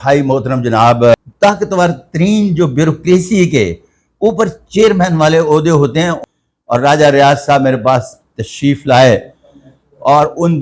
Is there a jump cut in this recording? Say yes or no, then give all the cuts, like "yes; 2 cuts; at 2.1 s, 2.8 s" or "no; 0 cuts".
yes; 2 cuts; at 1.1 s, 6.2 s